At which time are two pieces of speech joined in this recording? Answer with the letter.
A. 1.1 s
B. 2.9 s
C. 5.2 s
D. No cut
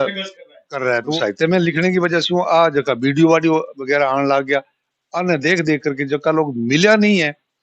A